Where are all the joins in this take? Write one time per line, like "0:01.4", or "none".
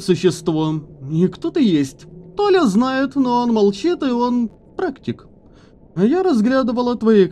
none